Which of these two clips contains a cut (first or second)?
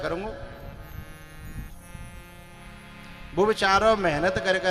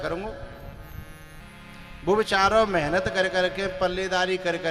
second